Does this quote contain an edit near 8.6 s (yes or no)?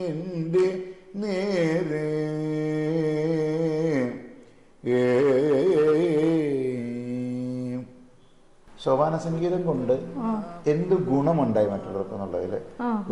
yes